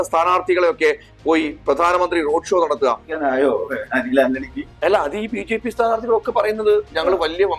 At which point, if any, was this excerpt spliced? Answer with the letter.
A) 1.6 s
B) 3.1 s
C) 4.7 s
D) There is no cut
B